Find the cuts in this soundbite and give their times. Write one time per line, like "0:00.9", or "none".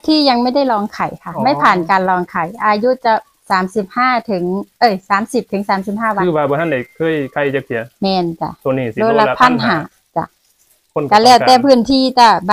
none